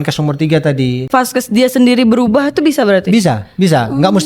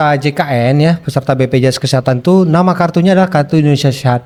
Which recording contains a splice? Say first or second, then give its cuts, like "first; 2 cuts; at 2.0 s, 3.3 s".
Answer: first; 1 cut; at 1.1 s